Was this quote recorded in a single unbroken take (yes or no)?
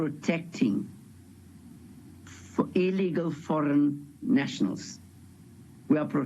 yes